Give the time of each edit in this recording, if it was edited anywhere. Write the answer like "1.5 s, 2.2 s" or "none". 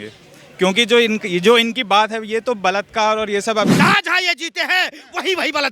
3.7 s